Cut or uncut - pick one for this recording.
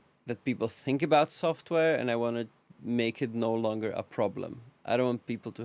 uncut